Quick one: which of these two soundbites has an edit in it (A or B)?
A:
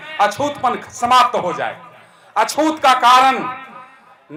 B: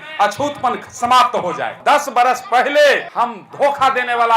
B